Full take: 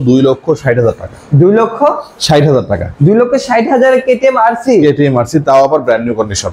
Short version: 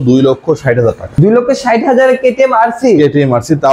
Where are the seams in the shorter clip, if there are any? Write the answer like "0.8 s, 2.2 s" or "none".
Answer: 1.1 s

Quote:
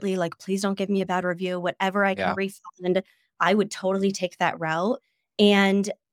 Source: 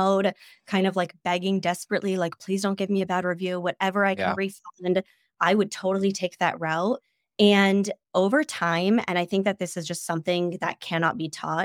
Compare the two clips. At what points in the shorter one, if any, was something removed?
none

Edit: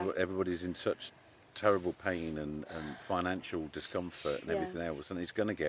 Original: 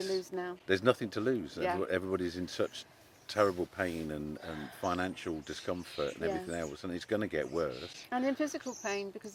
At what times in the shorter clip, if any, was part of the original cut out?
none

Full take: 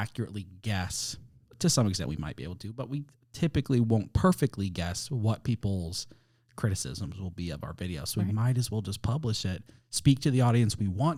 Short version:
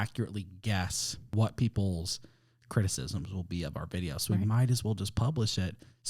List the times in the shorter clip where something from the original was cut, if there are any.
1.2 s

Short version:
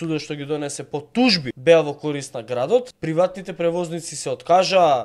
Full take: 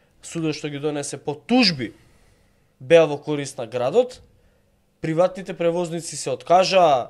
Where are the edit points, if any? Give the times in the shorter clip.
1.5 s, 2.9 s

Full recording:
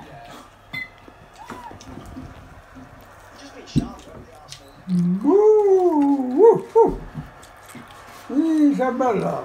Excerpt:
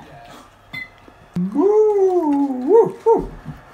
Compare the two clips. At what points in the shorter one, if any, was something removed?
1.4 s

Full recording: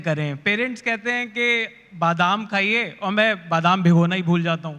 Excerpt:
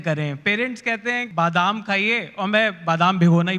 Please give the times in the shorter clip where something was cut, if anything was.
1.3 s

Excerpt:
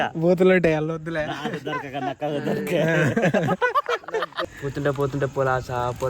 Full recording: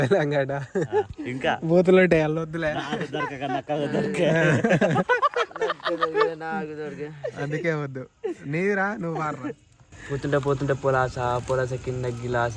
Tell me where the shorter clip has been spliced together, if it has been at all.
4.4 s

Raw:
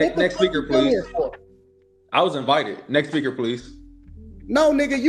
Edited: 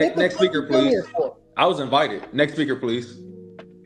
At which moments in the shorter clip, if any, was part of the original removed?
1.4 s

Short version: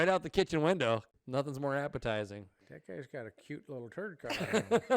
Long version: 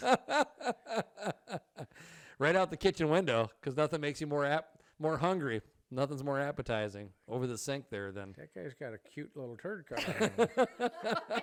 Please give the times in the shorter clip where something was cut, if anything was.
1.1 s, 2.6 s

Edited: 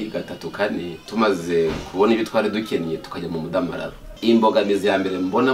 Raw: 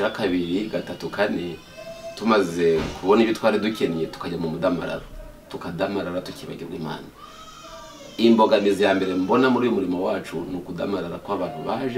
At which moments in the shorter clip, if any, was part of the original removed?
1.0 s, 4.0 s

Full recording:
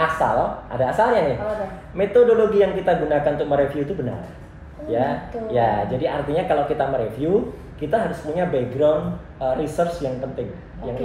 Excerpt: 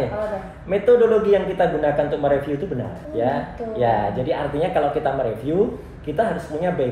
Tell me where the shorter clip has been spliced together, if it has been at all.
3.0 s

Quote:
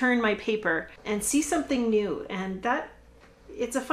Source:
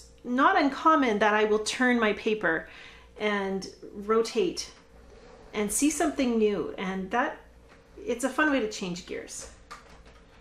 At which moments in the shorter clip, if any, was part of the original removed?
0.9 s

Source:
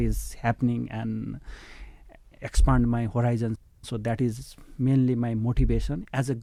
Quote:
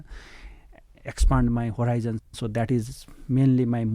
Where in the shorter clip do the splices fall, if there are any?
2.3 s

